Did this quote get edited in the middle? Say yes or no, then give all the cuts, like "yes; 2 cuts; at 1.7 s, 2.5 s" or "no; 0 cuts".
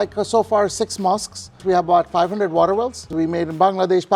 yes; 2 cuts; at 1.6 s, 3.1 s